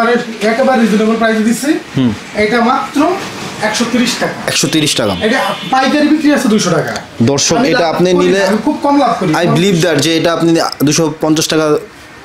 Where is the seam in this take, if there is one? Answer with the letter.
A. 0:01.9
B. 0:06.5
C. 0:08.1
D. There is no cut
D